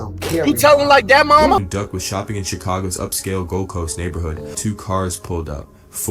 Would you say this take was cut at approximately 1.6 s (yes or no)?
yes